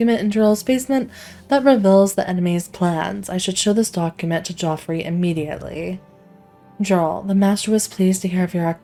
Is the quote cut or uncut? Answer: uncut